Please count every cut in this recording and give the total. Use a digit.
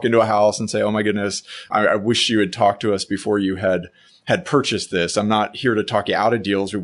1